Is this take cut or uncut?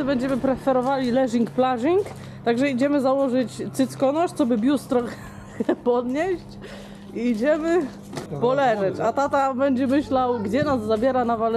uncut